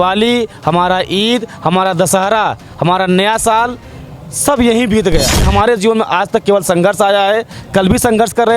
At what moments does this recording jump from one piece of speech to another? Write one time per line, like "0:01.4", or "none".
0:05.5